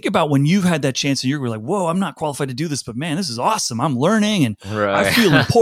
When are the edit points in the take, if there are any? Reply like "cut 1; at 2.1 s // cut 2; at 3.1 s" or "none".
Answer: none